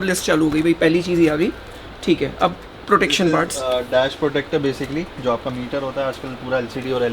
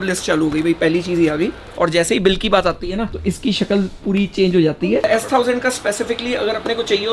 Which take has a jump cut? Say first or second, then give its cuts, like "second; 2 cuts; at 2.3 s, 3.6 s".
second; 3 cuts; at 1.6 s, 3.1 s, 5.0 s